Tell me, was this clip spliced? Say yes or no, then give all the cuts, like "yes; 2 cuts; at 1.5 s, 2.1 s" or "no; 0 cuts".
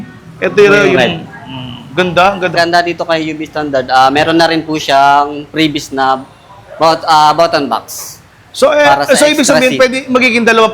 yes; 1 cut; at 2.5 s